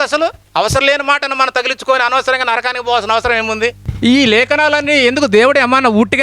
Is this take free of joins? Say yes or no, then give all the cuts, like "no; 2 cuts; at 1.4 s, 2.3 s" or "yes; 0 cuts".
no; 1 cut; at 3.8 s